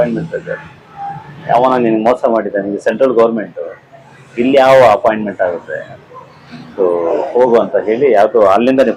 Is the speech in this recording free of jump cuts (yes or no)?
yes